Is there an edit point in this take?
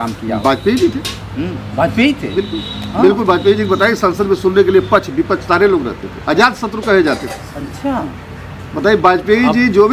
no; 0 cuts

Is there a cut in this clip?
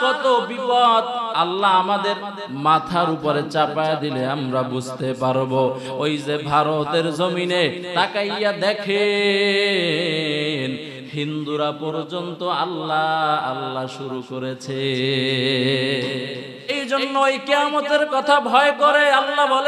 yes; 1 cut; at 16.8 s

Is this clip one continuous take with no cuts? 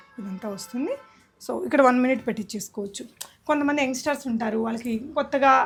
yes; 0 cuts

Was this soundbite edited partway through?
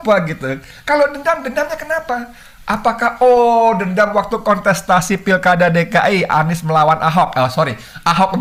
no; 0 cuts

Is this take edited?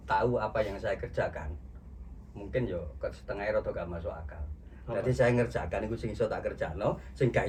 no; 0 cuts

